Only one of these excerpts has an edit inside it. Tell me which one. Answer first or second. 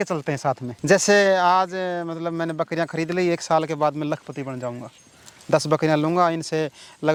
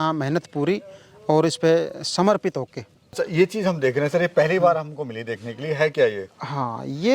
second